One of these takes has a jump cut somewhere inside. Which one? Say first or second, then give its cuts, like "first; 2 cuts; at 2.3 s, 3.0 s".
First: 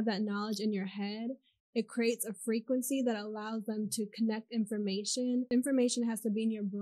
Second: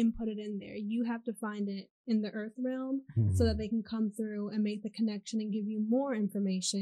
first; 1 cut; at 5.5 s